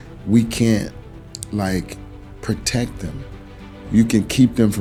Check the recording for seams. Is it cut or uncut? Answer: uncut